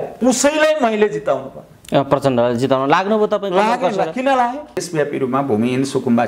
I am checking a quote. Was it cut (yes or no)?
yes